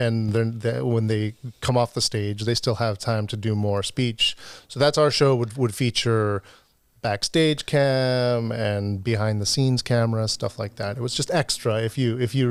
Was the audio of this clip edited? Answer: no; 0 cuts

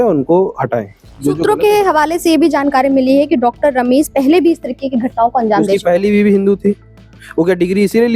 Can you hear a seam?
no; 0 cuts

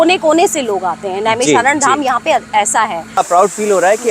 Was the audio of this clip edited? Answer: yes; 1 cut; at 3.2 s

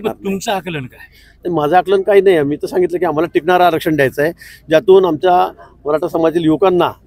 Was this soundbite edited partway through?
no; 0 cuts

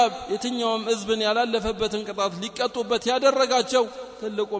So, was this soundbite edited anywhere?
no; 0 cuts

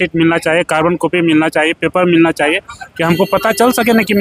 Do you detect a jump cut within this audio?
no; 0 cuts

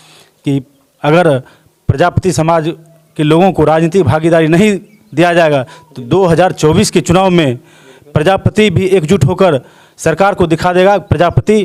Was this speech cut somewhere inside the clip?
no; 0 cuts

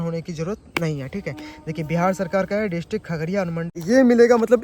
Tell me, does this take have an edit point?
yes; 1 cut; at 3.7 s

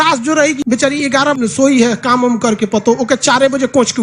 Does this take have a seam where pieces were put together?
yes; 1 cut; at 1.1 s

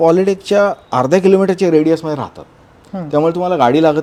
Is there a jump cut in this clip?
no; 0 cuts

